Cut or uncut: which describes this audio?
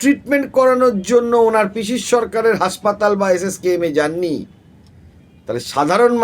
uncut